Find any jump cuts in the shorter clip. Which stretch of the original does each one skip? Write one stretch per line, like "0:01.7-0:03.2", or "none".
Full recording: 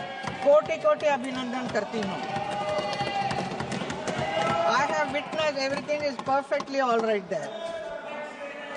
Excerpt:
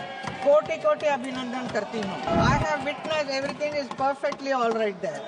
0:02.3-0:04.5

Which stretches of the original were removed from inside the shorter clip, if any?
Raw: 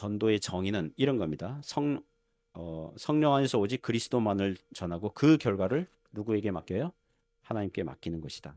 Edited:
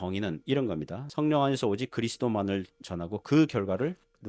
0:01.5-0:02.9

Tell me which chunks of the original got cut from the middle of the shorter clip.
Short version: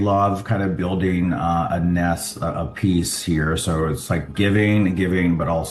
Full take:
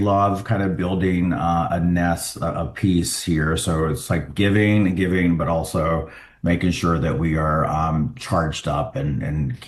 none

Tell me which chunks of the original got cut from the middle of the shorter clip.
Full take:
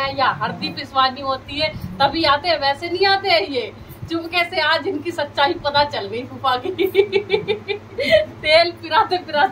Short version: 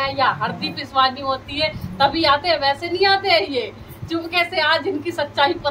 none

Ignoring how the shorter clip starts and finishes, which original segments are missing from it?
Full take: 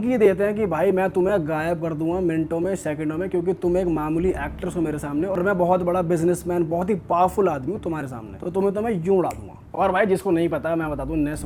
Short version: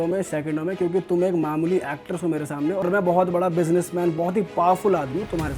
none

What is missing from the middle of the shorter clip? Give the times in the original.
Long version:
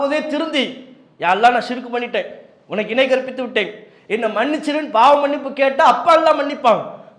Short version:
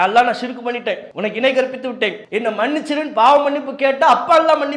0:02.3-0:02.6
0:03.7-0:04.0

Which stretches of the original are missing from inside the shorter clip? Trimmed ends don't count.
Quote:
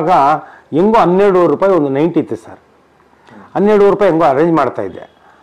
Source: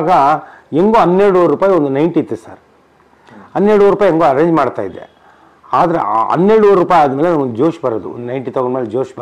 none

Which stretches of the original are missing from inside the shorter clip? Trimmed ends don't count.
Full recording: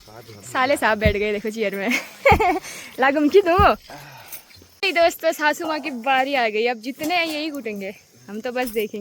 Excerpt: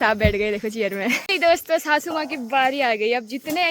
0:02.1-0:04.8

